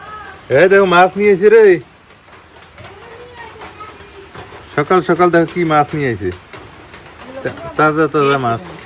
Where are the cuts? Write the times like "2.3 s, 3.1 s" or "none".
none